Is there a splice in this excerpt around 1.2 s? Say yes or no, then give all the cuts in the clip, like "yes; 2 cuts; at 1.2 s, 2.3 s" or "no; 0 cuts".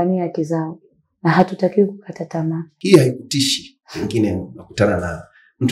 no; 1 cut; at 2.7 s